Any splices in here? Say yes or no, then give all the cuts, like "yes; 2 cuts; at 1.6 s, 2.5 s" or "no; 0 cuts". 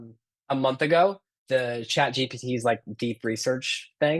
yes; 1 cut; at 1.3 s